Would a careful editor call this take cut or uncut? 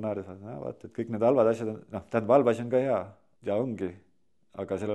cut